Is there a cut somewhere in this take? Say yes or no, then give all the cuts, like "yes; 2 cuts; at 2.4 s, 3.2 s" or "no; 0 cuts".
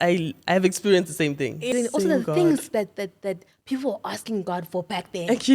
yes; 1 cut; at 1.7 s